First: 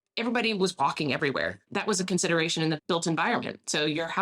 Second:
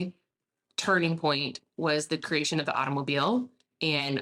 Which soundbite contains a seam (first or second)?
first